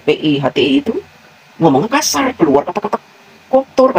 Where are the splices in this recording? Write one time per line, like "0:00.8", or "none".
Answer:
none